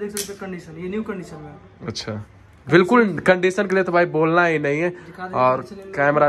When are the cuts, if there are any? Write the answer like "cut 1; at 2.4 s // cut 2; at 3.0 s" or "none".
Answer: none